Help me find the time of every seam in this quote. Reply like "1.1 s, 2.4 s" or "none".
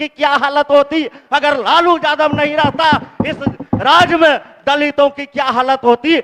none